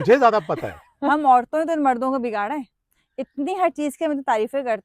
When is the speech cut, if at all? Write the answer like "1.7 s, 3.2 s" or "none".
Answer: 1.1 s